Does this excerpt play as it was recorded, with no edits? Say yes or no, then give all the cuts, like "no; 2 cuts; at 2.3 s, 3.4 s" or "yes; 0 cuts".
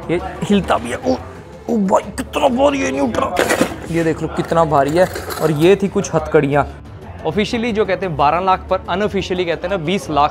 no; 1 cut; at 6.8 s